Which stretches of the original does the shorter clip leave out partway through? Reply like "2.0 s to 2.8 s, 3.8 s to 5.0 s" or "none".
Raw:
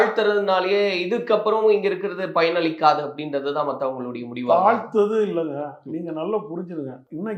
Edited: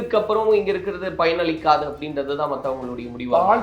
none